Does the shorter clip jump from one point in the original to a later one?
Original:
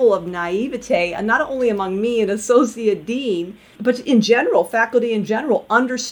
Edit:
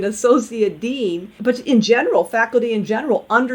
yes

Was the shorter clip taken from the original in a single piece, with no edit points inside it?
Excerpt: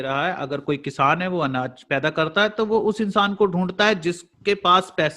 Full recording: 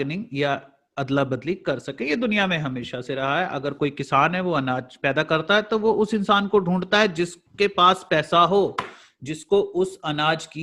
yes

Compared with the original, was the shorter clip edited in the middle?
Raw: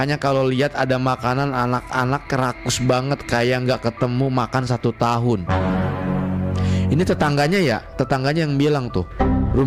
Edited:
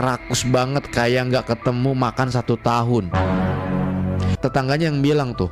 yes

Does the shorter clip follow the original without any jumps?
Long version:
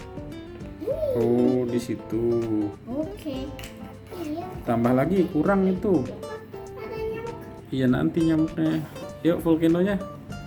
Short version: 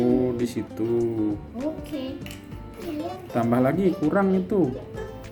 yes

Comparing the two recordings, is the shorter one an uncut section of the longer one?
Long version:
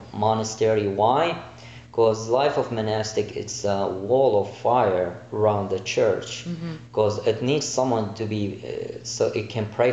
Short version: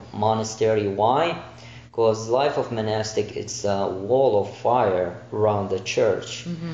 yes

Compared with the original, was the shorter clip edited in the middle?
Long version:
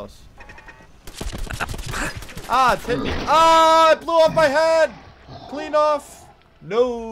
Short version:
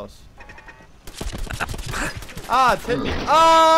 no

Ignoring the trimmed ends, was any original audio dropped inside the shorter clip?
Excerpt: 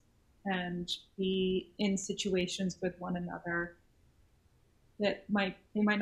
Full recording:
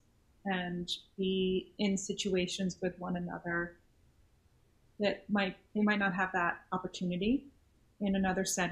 no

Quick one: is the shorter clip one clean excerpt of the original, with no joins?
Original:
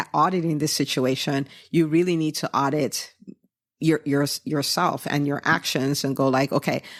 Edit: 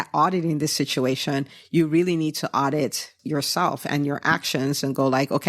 no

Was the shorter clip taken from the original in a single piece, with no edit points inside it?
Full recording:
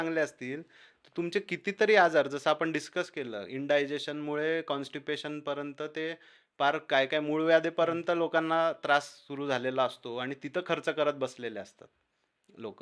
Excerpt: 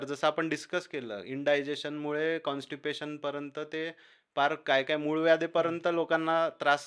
yes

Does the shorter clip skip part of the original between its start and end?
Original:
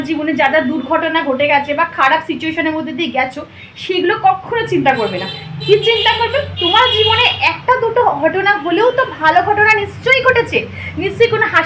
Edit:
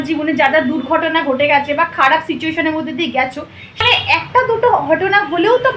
yes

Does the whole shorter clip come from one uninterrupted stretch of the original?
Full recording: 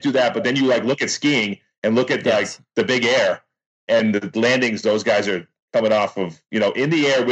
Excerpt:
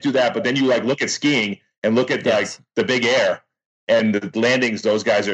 yes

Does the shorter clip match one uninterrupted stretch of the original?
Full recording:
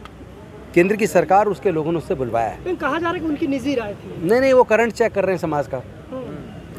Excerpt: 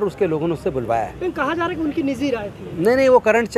yes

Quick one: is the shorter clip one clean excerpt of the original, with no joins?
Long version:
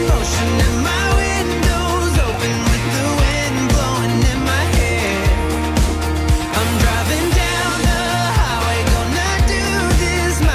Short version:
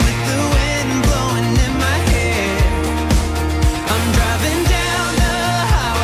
yes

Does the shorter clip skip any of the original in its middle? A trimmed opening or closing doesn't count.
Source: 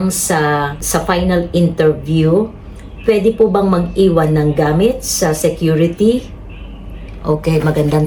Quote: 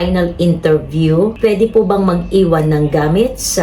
yes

